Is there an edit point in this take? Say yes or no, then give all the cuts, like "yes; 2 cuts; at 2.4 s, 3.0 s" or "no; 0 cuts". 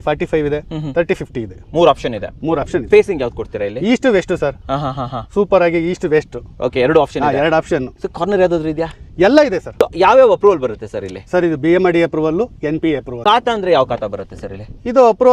yes; 2 cuts; at 9.8 s, 13.1 s